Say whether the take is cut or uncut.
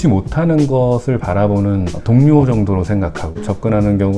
cut